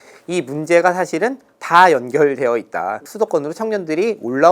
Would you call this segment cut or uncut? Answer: cut